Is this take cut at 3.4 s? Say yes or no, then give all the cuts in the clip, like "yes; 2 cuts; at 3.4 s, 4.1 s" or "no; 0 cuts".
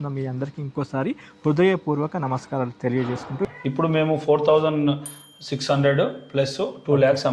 yes; 1 cut; at 3.4 s